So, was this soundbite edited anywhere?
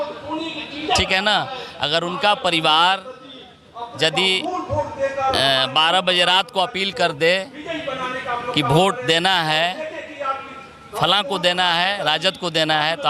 no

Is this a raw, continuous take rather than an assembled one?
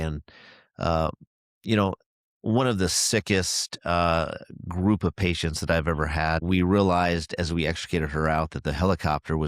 no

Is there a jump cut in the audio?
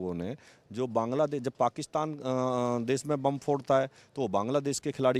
no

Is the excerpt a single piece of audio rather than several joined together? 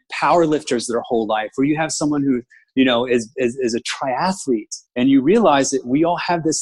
yes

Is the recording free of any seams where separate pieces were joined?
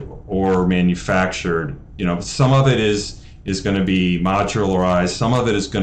yes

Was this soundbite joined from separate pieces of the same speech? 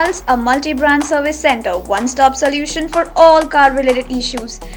no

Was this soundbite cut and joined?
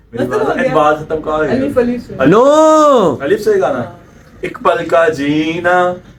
no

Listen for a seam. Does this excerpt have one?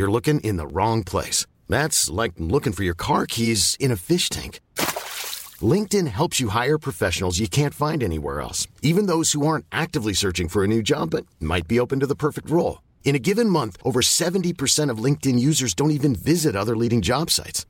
no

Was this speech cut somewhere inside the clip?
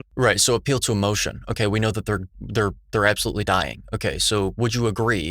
no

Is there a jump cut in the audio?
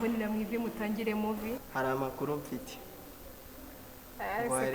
yes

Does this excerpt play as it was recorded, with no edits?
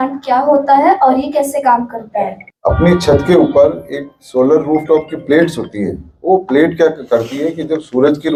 yes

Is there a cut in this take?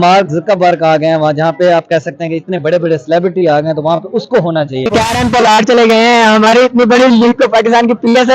yes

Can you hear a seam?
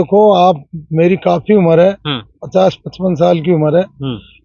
no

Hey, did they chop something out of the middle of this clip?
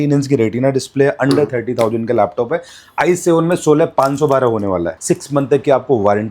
yes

